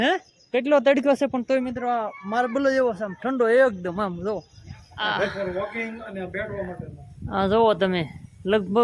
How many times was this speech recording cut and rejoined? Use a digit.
1